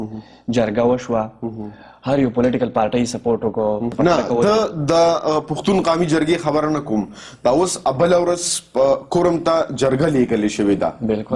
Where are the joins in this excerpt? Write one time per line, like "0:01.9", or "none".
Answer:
0:03.9